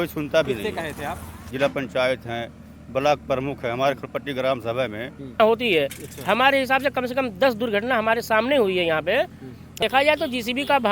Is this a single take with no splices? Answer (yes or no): no